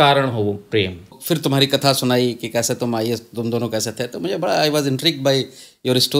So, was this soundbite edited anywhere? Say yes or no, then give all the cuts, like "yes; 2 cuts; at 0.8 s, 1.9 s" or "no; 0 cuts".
yes; 1 cut; at 1.2 s